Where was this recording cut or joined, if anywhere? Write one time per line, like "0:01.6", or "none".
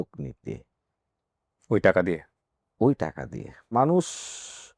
0:03.6